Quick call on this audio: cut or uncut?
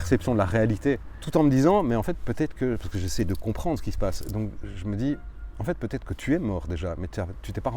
cut